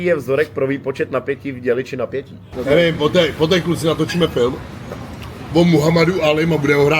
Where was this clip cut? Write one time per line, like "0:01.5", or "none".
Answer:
0:02.4